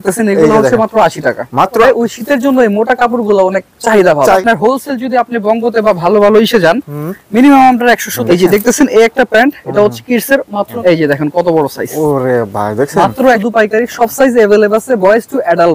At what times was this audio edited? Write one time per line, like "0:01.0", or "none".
0:01.8
0:04.4
0:08.1
0:10.7
0:13.4